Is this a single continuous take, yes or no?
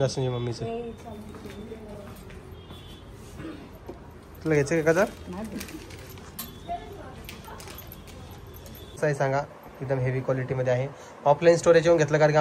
no